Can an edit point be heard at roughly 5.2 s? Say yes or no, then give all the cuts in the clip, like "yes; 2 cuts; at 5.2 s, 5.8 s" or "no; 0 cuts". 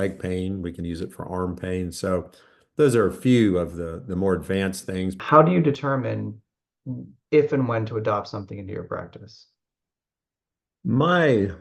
yes; 1 cut; at 5.2 s